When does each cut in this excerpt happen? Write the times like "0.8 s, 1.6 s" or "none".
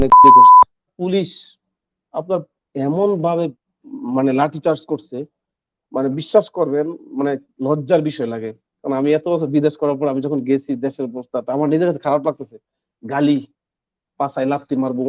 0.9 s